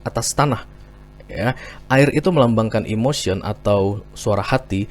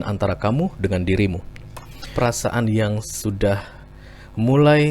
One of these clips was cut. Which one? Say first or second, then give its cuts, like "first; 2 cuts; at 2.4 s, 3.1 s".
second; 1 cut; at 2.1 s